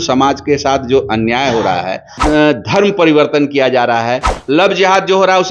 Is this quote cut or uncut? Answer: cut